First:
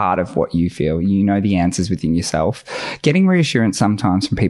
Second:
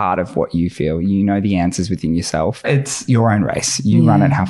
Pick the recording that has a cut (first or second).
second